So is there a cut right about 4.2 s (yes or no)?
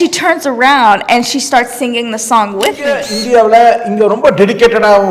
no